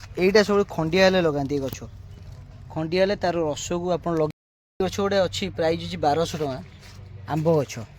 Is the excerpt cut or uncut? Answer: cut